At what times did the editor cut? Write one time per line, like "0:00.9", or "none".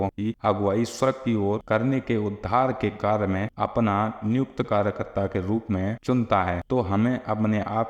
none

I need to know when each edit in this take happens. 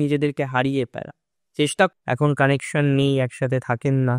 0:01.9

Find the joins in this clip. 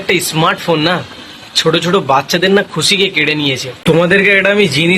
0:03.8

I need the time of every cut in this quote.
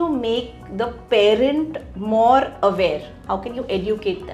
none

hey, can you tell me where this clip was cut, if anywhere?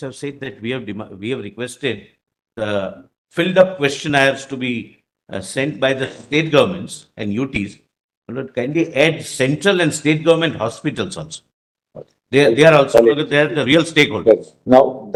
none

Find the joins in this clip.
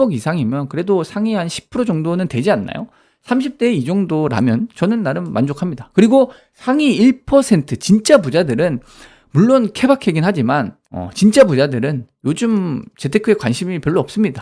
none

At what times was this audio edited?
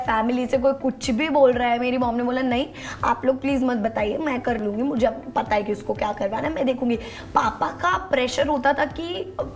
none

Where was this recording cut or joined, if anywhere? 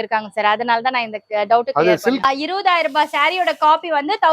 0:02.2

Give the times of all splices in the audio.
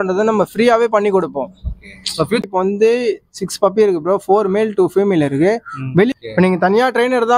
0:02.4
0:06.1

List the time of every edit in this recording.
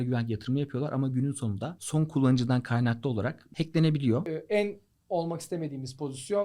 0:01.7
0:03.4
0:04.3

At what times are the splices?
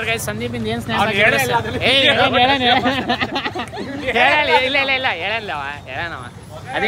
none

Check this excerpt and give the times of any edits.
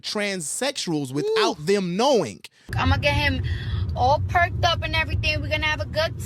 0:02.7

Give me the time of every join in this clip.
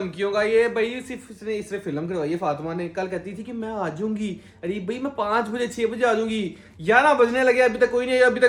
none

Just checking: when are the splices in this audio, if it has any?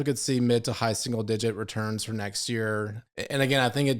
0:03.0

